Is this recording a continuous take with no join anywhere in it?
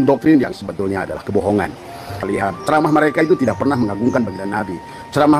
no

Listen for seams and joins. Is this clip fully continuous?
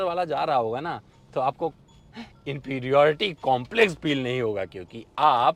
yes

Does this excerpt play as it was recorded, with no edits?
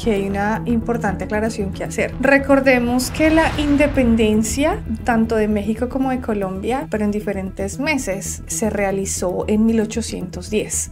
yes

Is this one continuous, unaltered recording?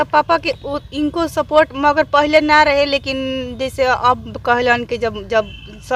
yes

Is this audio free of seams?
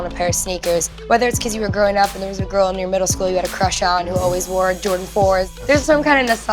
no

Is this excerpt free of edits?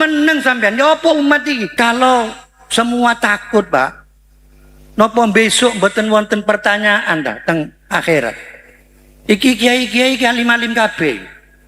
no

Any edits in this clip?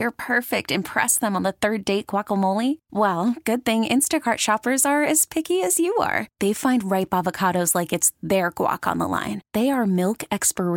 no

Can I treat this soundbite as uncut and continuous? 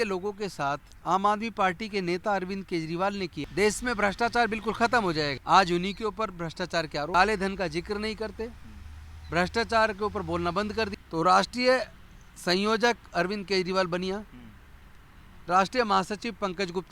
no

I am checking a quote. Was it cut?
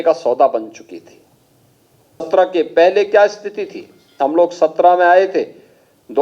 yes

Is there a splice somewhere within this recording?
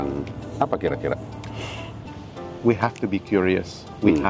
yes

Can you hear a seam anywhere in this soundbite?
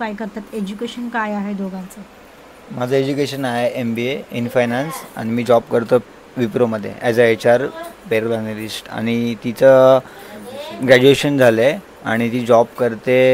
no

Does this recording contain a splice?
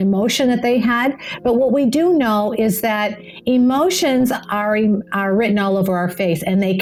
no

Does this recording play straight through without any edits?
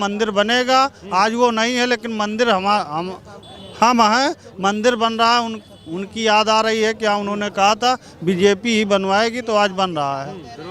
yes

